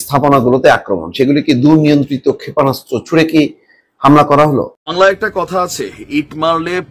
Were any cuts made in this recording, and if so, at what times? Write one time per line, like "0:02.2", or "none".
0:04.8

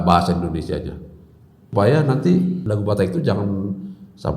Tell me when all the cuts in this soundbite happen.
0:01.7
0:02.6

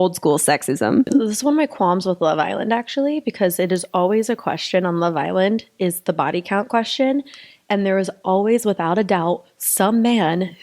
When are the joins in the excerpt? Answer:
0:01.1

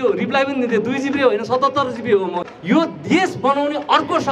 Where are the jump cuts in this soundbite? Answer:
0:02.1

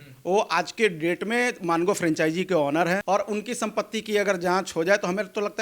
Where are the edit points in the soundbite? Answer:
0:03.0

